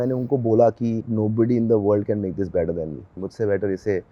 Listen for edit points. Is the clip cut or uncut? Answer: cut